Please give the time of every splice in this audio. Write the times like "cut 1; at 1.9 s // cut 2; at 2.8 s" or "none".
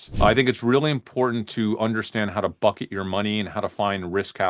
none